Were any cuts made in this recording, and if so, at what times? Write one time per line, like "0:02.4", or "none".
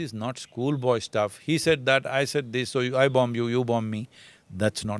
none

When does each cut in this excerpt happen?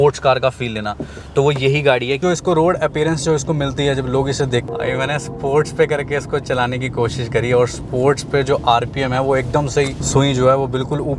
0:02.2
0:04.7
0:10.0

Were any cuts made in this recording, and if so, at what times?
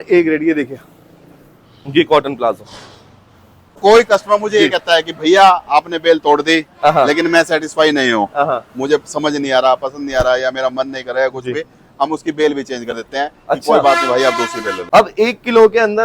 0:03.8
0:14.7

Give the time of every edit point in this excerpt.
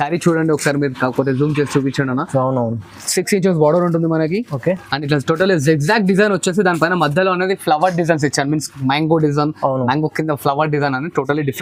none

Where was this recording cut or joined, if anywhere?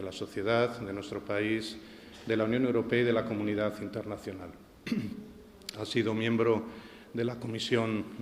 none

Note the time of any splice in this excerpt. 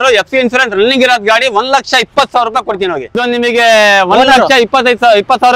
0:03.2

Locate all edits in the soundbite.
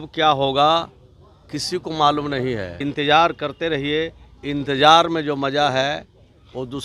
0:02.7

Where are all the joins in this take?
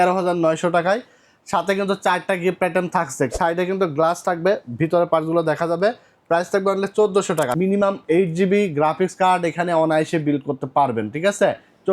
0:03.3
0:07.5

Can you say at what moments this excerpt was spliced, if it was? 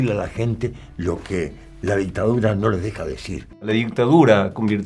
0:03.7

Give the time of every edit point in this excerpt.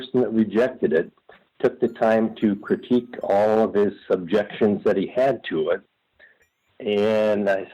0:01.4

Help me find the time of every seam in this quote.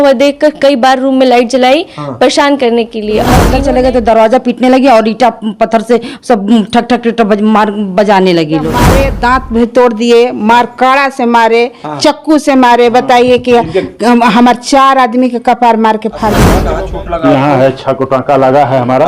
0:03.5
0:09.0
0:16.5

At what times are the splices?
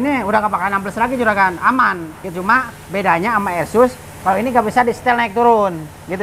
none

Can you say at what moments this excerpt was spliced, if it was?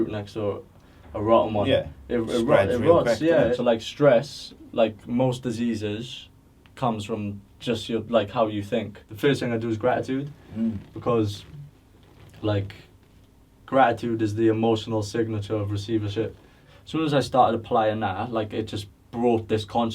0:03.6
0:09.0
0:16.7

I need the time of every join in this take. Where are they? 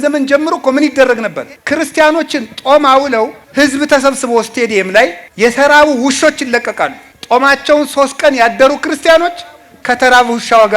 0:01.5
0:03.4
0:05.2
0:07.1

